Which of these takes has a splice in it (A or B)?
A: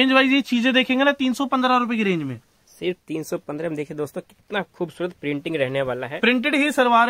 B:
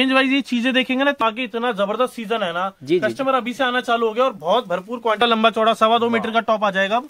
B